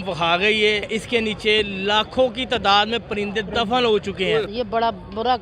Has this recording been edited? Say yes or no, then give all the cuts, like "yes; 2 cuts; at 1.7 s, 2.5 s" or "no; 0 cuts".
yes; 2 cuts; at 0.9 s, 4.5 s